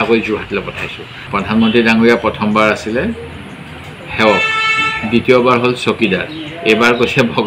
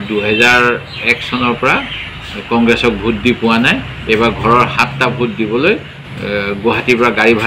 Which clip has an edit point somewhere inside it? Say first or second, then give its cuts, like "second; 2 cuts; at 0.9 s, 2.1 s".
first; 1 cut; at 1.3 s